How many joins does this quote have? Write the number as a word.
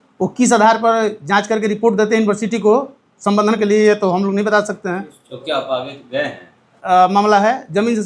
one